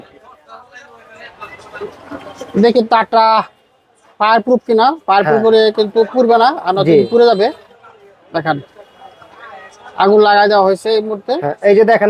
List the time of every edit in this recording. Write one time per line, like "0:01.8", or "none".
none